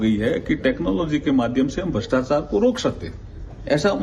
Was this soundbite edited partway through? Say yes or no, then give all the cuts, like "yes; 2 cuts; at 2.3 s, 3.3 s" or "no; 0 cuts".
yes; 1 cut; at 1.8 s